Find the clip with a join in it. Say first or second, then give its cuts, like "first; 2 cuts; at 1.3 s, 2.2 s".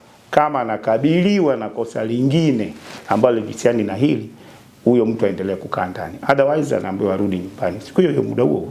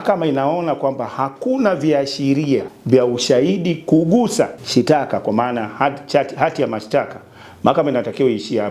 second; 2 cuts; at 2.7 s, 4.6 s